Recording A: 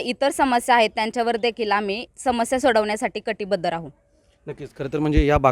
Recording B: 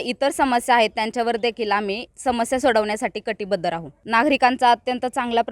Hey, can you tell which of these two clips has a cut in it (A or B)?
B